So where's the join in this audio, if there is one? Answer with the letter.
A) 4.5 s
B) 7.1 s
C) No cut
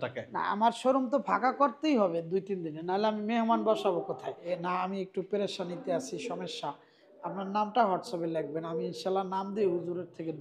A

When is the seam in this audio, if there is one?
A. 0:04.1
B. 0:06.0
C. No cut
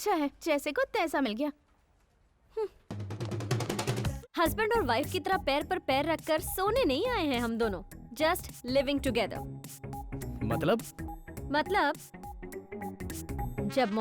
A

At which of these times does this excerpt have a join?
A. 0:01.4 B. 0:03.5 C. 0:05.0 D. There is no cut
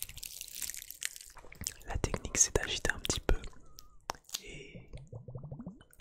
A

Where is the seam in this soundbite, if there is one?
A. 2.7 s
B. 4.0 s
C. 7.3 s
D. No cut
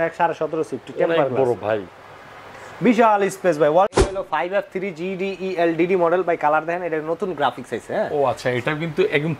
B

